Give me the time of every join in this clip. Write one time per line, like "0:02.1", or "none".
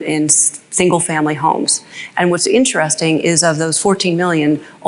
none

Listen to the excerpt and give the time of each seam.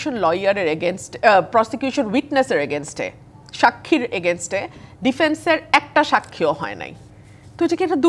none

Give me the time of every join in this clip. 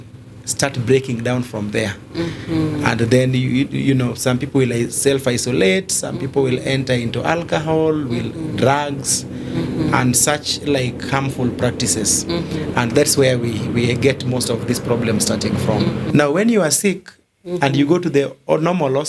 0:16.1

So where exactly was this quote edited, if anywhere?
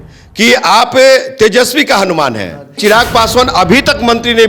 0:02.8

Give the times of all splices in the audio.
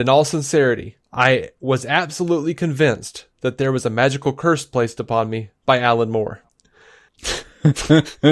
none

